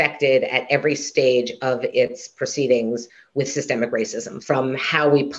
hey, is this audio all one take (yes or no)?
no